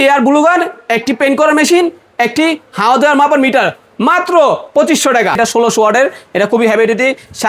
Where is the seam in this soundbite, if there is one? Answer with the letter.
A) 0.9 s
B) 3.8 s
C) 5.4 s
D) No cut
C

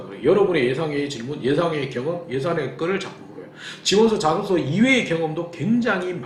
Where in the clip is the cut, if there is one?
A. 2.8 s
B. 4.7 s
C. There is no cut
C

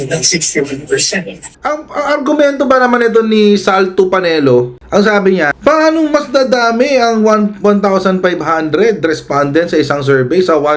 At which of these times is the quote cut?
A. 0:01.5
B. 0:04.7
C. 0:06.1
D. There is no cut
A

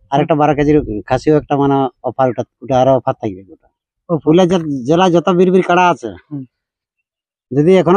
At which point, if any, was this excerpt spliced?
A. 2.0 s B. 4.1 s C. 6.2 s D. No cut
B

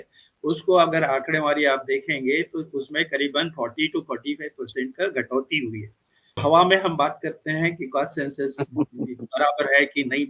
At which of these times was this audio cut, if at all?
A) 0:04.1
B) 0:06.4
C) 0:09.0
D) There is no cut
B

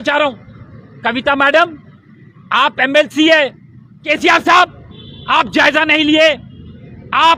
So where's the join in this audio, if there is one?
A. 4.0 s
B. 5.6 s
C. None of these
A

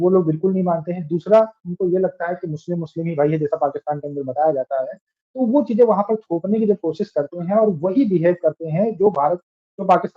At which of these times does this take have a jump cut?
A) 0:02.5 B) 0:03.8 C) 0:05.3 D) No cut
D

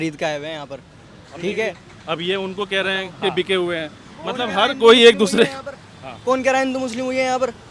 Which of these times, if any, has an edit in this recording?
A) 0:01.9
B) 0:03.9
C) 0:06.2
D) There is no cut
D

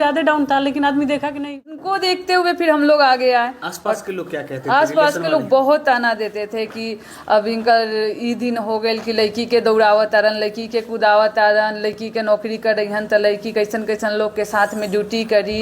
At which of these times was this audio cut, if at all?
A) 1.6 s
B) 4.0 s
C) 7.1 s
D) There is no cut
A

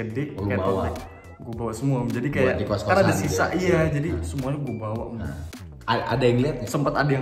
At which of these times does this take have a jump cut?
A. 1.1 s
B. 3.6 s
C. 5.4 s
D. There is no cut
C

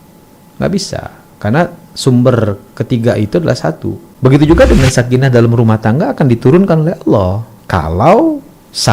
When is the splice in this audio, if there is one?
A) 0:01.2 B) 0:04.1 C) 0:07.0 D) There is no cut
B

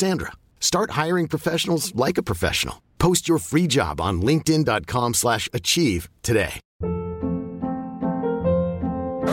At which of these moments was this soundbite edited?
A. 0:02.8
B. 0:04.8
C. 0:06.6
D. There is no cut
C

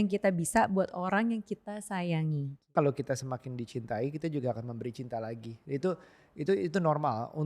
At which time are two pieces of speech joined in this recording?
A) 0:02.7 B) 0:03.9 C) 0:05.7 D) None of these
A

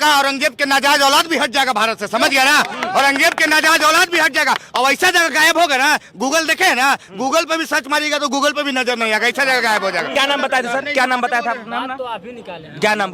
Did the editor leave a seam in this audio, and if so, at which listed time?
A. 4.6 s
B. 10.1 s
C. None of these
B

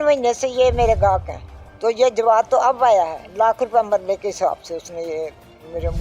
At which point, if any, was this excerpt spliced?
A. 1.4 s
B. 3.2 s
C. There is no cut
B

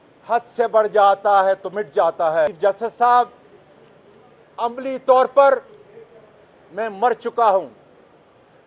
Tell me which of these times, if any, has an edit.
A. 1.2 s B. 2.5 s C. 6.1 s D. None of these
B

